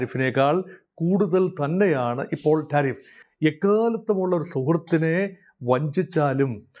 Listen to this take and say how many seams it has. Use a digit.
1